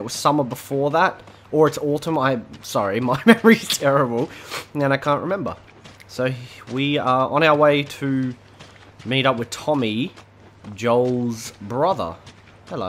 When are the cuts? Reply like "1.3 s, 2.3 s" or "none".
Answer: none